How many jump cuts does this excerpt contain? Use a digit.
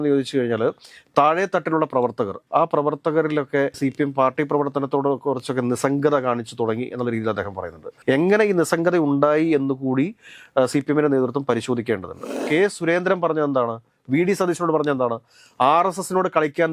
1